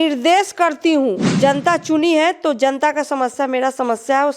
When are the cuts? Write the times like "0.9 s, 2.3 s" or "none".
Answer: 1.3 s